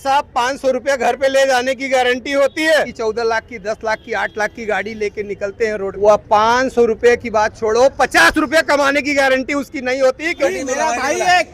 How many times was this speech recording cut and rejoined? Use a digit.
3